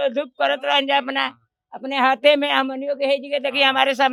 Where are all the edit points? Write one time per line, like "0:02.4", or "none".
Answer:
none